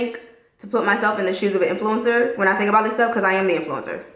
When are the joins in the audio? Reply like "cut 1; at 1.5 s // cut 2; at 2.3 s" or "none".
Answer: none